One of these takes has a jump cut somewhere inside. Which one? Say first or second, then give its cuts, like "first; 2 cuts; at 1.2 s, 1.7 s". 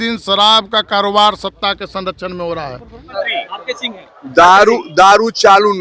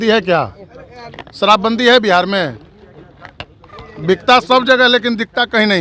first; 1 cut; at 3.2 s